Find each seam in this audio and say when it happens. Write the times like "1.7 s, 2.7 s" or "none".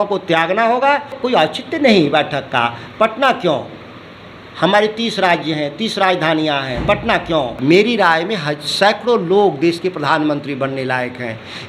1.2 s, 7.5 s

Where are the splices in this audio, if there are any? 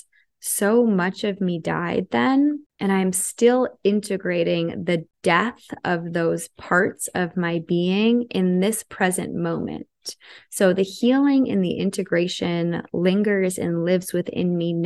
2.7 s, 5.1 s

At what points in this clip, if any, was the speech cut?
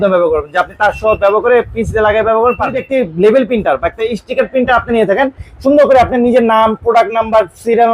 2.8 s

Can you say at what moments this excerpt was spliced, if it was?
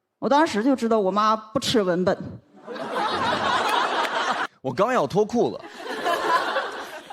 4.4 s

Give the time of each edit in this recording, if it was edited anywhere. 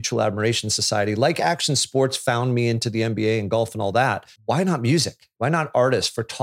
4.3 s, 5.2 s

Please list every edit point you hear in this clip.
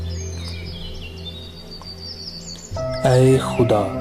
3.0 s

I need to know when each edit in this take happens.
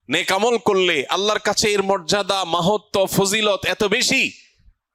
none

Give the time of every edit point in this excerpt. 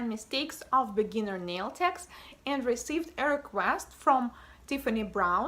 2.8 s

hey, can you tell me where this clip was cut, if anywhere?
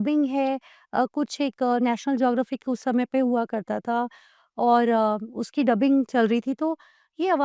none

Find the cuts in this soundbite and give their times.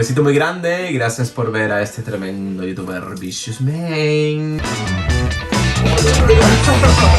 4.6 s

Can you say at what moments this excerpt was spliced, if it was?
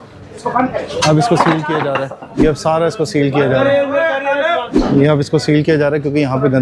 2.3 s, 4.7 s

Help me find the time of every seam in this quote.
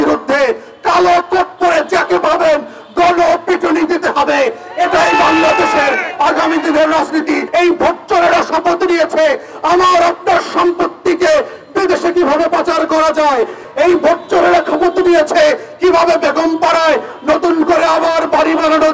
7.4 s, 13.6 s

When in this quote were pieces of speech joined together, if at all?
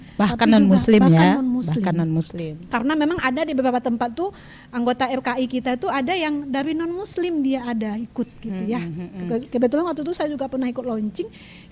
none

